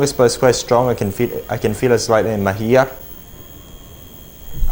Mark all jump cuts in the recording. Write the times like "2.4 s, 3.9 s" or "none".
none